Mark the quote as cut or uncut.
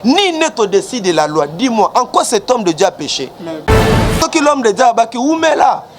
cut